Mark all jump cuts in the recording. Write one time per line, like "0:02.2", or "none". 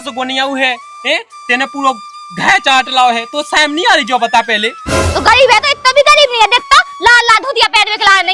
0:05.0